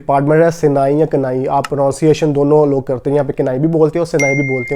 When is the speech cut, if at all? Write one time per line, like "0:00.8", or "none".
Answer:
none